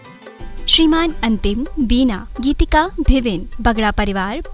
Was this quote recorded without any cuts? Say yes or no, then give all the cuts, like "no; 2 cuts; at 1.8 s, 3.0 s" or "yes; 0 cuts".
no; 1 cut; at 2.5 s